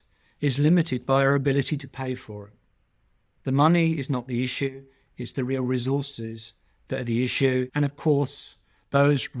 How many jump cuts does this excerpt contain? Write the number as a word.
one